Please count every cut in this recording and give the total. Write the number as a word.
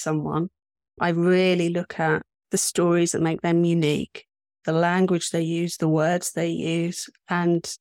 one